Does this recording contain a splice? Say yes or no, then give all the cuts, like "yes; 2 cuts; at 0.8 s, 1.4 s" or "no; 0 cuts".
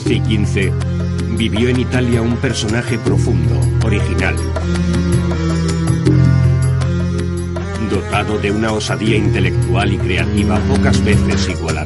no; 0 cuts